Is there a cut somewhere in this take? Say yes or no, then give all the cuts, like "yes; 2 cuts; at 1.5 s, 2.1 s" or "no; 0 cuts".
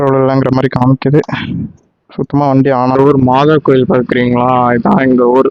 yes; 1 cut; at 2.9 s